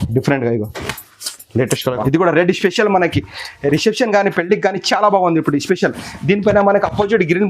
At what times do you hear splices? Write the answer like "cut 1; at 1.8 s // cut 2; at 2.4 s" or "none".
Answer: cut 1; at 2.0 s